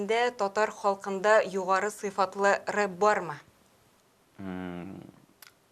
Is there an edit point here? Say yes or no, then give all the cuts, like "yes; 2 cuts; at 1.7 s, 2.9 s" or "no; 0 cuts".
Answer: no; 0 cuts